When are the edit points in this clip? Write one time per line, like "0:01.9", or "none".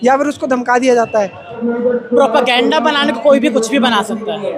0:01.6